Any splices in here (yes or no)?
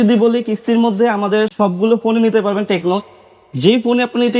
no